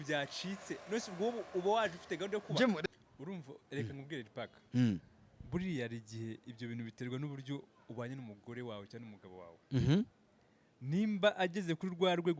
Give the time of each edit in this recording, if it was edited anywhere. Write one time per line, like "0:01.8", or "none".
0:02.8